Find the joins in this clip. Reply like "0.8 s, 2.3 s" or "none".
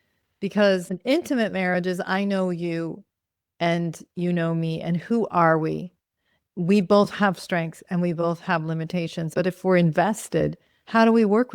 0.8 s, 6.3 s, 9.3 s